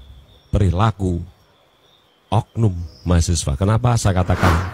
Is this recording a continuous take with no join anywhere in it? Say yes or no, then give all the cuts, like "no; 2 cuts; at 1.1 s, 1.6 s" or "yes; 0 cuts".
yes; 0 cuts